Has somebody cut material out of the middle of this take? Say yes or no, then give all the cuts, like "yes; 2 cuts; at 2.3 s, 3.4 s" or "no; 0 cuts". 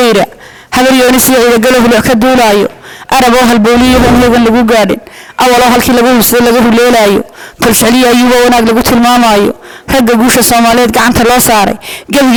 no; 0 cuts